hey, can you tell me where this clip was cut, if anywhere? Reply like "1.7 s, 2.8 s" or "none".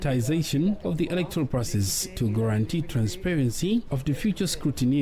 0.8 s, 2.1 s, 4.0 s